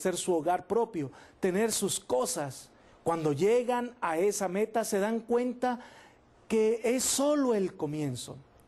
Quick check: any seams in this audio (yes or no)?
yes